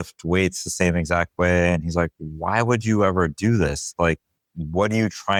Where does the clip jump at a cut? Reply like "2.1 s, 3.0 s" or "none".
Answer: none